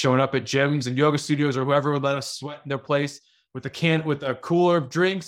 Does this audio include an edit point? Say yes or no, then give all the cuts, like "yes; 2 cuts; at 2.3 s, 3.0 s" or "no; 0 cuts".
no; 0 cuts